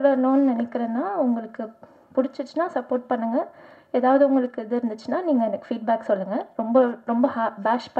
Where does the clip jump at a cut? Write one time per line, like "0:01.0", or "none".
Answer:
none